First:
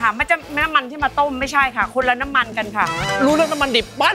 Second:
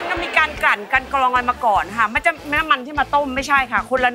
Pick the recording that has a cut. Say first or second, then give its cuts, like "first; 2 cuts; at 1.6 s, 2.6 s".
first; 1 cut; at 3.1 s